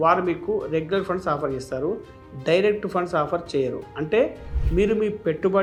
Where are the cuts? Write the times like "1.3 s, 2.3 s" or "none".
none